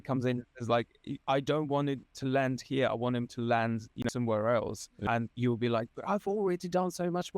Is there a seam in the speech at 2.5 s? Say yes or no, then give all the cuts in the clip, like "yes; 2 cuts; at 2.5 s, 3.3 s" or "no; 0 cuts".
no; 2 cuts; at 4.0 s, 5.0 s